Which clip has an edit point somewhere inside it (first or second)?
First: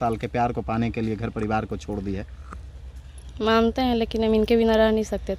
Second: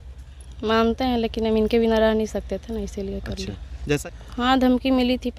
second